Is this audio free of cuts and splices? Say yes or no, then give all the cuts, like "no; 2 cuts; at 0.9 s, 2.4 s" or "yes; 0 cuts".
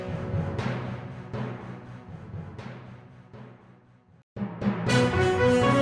no; 1 cut; at 4.0 s